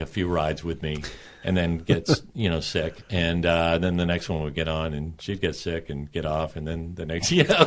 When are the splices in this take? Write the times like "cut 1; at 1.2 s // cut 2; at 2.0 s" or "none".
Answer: none